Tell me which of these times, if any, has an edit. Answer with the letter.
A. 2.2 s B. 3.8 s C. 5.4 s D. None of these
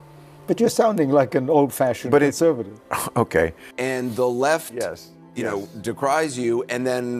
B